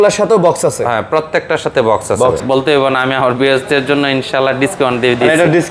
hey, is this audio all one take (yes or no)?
no